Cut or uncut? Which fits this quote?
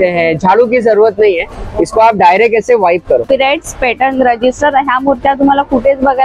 cut